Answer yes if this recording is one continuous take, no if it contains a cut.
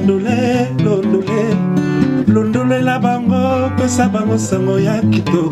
yes